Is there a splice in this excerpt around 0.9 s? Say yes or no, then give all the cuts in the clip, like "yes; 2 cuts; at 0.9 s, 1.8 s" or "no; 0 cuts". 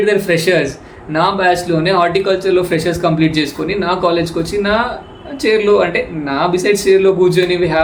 no; 0 cuts